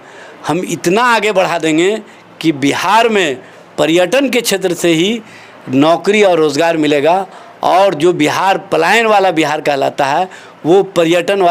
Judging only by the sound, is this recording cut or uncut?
uncut